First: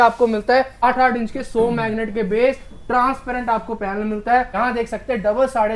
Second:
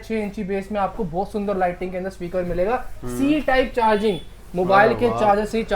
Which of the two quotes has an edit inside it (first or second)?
first